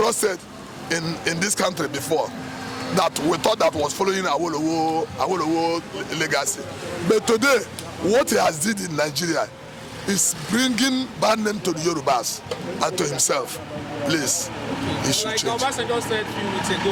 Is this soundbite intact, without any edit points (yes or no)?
yes